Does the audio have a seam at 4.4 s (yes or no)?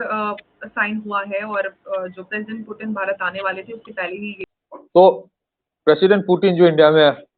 yes